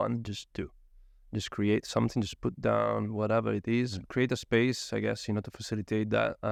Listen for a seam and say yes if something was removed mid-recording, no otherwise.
no